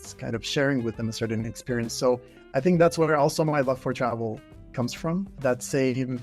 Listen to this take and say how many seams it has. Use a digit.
1